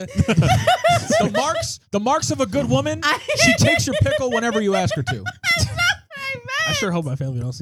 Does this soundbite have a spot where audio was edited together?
no; 0 cuts

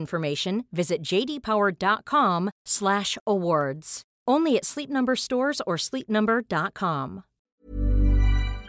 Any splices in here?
yes; 1 cut; at 7.5 s

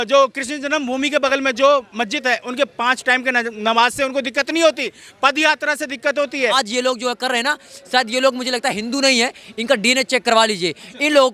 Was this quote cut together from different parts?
yes; 1 cut; at 6.6 s

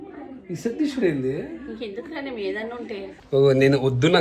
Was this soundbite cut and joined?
yes; 1 cut; at 3.1 s

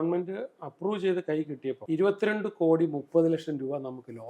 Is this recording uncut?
no; 1 cut; at 1.8 s

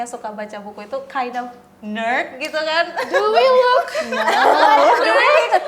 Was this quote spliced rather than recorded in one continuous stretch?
no; 0 cuts

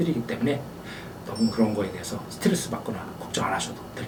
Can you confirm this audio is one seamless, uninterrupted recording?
yes; 0 cuts

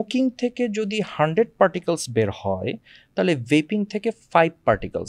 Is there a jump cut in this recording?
no; 0 cuts

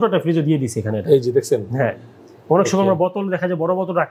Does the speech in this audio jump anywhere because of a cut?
no; 0 cuts

